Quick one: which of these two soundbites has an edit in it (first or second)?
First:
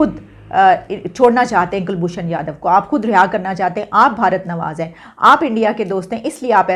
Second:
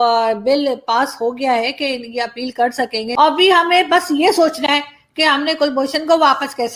second